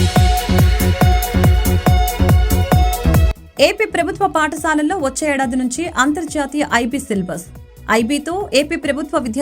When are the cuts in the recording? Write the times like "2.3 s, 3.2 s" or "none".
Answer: 3.4 s